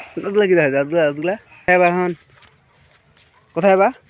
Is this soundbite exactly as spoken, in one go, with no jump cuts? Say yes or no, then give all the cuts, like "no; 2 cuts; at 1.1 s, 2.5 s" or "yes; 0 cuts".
no; 1 cut; at 1.7 s